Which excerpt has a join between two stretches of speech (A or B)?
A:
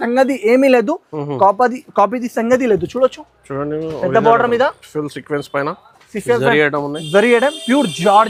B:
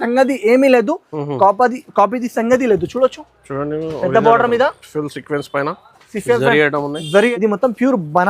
B